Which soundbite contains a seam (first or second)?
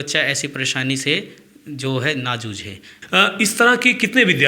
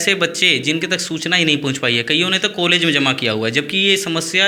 first